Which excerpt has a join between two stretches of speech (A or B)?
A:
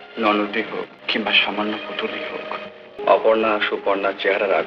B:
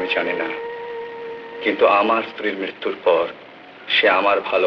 A